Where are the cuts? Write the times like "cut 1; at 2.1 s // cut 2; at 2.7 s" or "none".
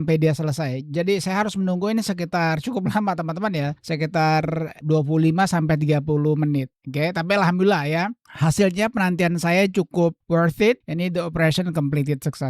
cut 1; at 3.8 s // cut 2; at 4.8 s